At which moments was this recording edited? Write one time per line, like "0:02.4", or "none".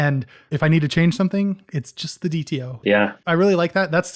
0:02.8